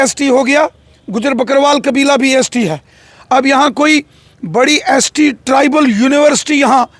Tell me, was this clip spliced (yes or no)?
no